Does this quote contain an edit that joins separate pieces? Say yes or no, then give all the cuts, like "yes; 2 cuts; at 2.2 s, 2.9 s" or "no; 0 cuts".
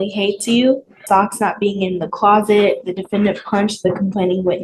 yes; 1 cut; at 1.0 s